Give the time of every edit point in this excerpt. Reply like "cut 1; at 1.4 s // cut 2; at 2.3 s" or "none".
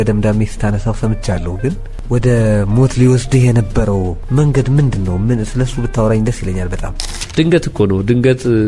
cut 1; at 1.9 s // cut 2; at 4.2 s // cut 3; at 7.2 s